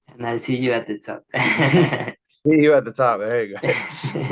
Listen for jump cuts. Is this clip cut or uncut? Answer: uncut